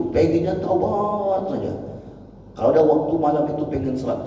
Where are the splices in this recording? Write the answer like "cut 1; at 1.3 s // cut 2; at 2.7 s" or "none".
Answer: none